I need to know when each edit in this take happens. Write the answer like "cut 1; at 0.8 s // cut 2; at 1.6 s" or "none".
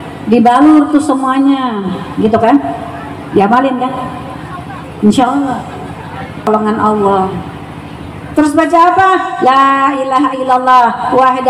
cut 1; at 6.5 s

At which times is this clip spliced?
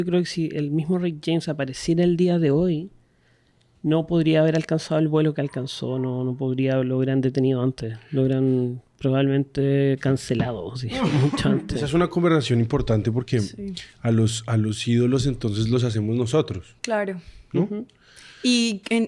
none

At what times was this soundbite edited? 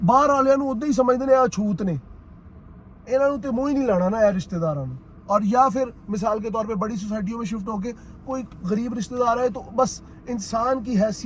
none

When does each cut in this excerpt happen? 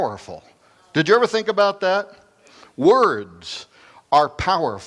cut 1; at 1.4 s

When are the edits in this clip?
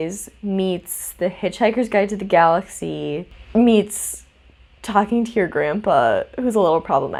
none

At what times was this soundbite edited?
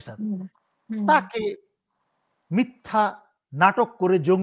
none

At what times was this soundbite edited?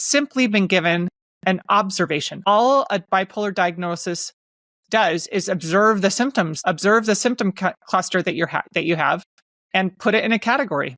cut 1; at 2.5 s // cut 2; at 6.5 s

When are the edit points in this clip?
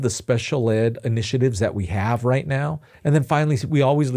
cut 1; at 2.9 s

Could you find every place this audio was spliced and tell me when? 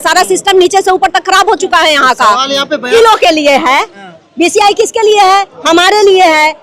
cut 1; at 2.9 s

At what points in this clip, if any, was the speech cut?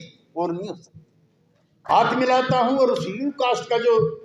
cut 1; at 1.9 s

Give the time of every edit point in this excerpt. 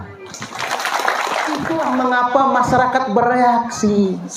cut 1; at 1.6 s

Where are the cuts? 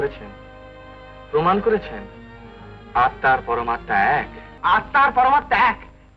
cut 1; at 4.4 s

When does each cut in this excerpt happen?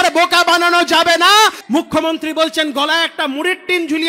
cut 1; at 1.6 s

